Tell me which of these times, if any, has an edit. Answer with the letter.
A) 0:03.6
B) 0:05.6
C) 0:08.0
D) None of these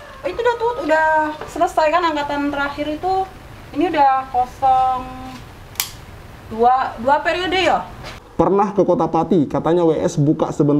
C